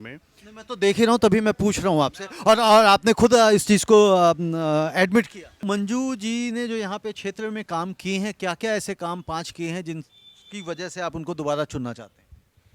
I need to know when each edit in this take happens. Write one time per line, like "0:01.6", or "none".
0:05.6